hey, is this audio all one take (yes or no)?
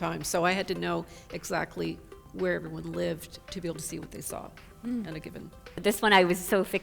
no